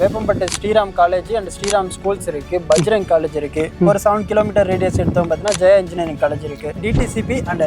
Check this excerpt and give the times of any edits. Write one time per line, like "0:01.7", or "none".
0:06.8